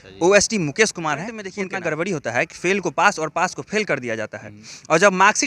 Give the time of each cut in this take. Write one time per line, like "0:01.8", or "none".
0:01.5

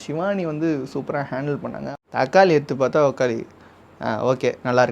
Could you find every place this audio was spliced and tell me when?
0:01.9

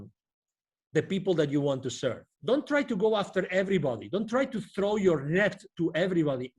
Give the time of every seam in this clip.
0:02.3

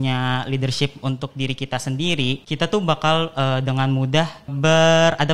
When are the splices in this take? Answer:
0:02.4
0:04.5

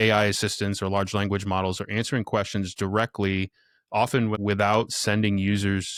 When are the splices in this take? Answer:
none

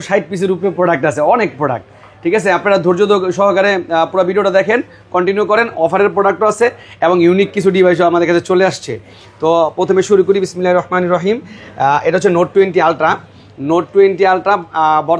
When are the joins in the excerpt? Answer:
none

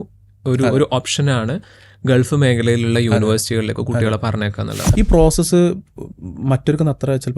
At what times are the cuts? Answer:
0:04.8

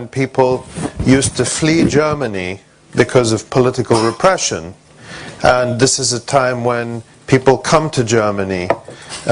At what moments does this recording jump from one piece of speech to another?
0:01.3

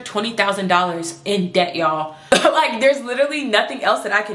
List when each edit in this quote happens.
0:02.3

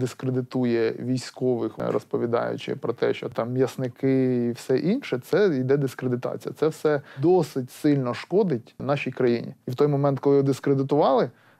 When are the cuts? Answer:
0:01.8
0:03.3
0:07.1
0:08.8
0:09.7

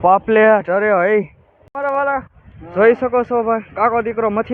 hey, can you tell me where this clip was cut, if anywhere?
0:01.5

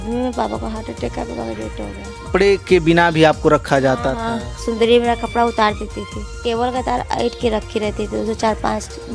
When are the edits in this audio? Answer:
0:02.3
0:06.4

